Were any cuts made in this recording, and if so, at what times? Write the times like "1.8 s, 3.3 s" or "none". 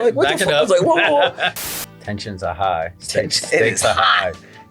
1.5 s